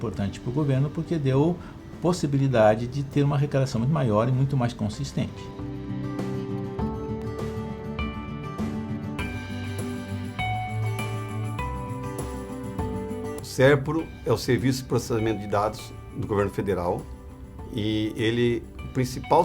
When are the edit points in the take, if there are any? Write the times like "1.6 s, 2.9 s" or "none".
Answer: 2.9 s